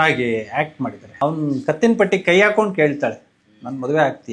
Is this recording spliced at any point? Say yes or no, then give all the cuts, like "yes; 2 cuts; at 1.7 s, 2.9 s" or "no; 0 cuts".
yes; 1 cut; at 1.0 s